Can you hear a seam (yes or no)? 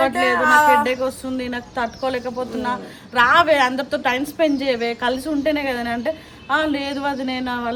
no